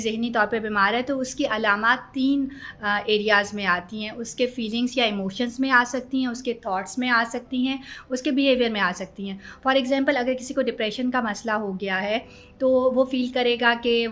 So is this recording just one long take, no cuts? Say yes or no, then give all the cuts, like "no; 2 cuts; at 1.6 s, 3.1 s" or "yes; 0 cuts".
yes; 0 cuts